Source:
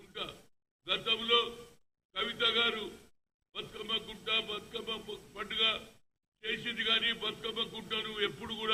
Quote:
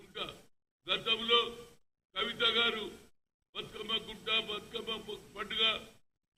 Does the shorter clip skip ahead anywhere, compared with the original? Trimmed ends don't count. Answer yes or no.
no